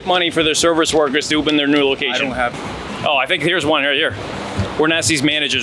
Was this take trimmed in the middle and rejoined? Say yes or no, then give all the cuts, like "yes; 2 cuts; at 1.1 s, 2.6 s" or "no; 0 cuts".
yes; 1 cut; at 2.6 s